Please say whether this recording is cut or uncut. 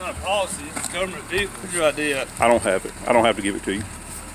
cut